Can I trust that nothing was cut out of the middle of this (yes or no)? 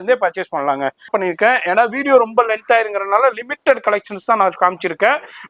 no